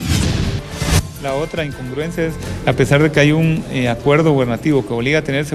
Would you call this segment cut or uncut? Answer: cut